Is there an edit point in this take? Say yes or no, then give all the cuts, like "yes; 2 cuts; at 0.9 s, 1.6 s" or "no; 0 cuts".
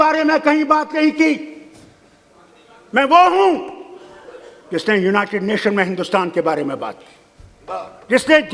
no; 0 cuts